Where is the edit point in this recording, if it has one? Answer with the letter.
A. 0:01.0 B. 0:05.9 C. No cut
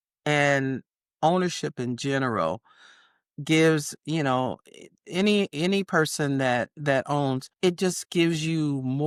C